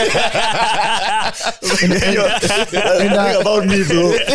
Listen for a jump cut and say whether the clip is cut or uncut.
uncut